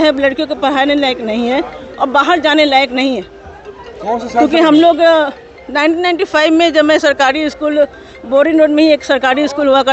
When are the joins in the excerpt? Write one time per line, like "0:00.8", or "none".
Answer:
none